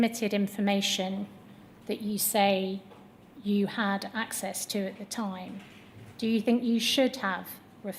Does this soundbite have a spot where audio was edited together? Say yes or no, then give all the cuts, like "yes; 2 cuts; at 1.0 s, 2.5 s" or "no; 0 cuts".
no; 0 cuts